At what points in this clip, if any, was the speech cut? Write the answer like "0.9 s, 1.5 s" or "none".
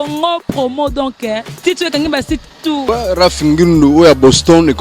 2.8 s